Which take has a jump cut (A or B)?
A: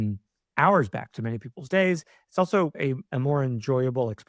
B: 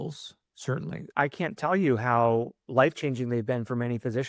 A